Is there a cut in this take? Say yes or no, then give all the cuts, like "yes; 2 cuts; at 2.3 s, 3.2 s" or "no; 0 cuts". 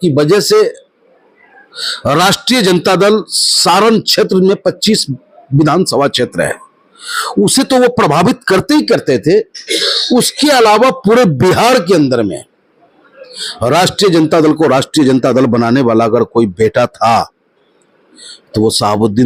no; 0 cuts